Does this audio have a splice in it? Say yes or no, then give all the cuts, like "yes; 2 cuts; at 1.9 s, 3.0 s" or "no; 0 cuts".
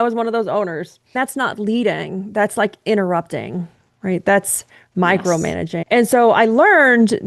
yes; 2 cuts; at 1.2 s, 5.8 s